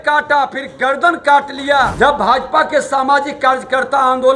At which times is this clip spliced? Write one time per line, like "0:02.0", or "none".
0:01.9